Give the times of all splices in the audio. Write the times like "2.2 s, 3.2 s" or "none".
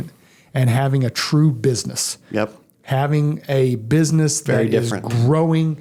none